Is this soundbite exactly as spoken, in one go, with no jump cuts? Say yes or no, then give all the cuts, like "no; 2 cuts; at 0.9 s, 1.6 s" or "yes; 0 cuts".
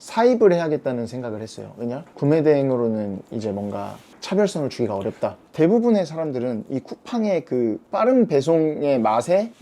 no; 1 cut; at 5.4 s